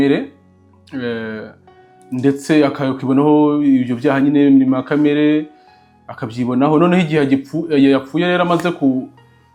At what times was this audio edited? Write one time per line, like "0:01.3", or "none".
none